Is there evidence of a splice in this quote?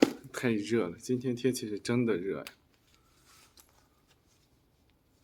no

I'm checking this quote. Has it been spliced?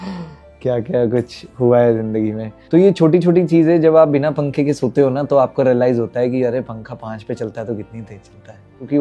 no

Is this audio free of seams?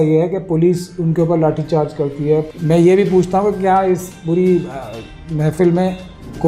no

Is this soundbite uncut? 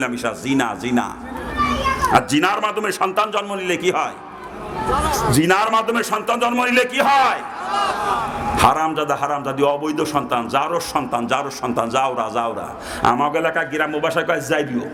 yes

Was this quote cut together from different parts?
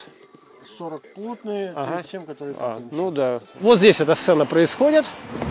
yes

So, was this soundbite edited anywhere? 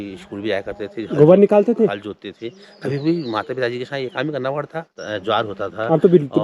yes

